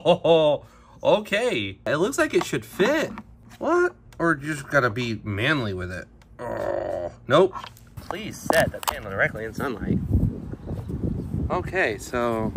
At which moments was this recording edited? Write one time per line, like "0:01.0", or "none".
0:01.9
0:07.8